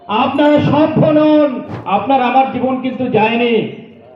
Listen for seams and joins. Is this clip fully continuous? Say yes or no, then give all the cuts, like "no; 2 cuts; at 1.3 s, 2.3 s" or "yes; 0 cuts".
no; 1 cut; at 1.7 s